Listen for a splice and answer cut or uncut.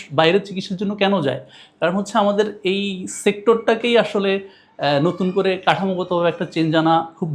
uncut